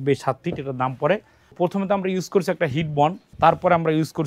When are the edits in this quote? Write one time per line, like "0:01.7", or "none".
0:01.5
0:03.3